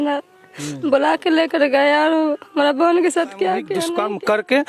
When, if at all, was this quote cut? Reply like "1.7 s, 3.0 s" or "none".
3.8 s